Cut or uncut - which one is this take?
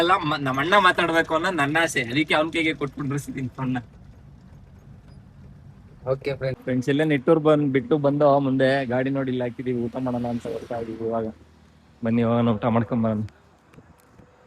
cut